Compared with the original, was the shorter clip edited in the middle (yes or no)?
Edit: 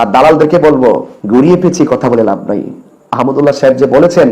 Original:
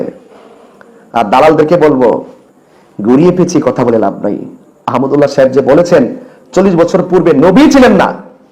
yes